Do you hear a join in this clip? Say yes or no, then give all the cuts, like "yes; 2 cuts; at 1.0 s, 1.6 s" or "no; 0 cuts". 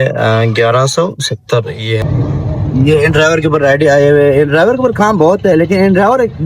yes; 1 cut; at 2.0 s